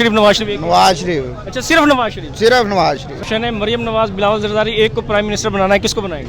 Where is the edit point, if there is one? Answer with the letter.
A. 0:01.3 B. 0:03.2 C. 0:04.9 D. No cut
B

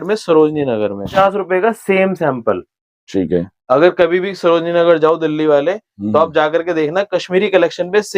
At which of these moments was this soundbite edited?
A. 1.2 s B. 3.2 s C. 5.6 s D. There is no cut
A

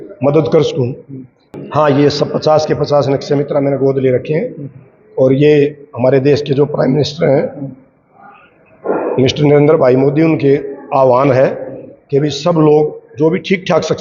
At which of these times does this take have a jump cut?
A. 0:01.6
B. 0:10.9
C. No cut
A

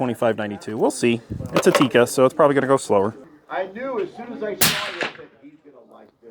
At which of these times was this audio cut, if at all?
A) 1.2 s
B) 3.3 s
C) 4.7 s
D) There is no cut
B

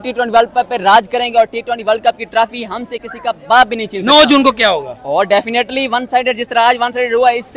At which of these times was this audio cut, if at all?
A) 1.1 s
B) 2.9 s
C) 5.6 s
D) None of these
D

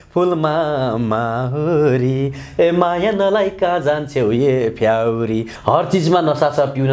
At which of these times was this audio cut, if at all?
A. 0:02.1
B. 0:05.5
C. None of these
B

